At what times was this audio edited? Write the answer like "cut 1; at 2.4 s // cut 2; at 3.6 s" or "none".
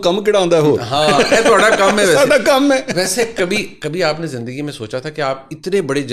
none